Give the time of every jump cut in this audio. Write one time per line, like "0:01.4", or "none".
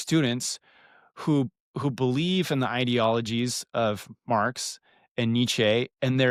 none